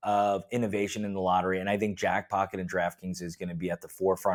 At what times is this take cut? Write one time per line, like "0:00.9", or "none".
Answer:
none